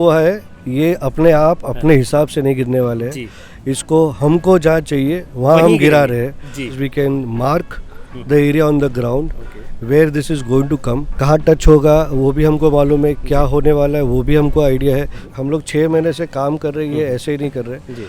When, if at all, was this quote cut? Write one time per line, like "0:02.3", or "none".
0:06.8
0:11.1
0:15.3